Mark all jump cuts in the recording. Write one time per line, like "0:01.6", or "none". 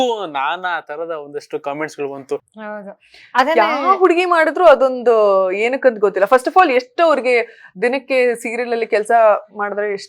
0:02.5